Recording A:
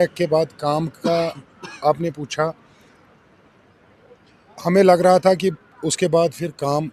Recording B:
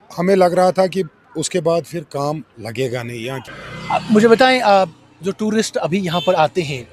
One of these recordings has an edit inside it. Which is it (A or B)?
B